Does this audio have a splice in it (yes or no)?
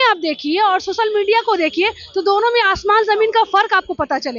no